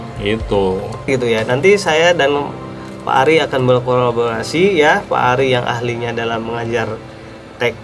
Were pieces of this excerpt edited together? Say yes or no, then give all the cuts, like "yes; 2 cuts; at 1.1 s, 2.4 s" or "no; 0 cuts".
yes; 1 cut; at 1.1 s